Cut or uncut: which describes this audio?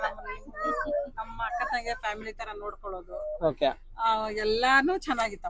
uncut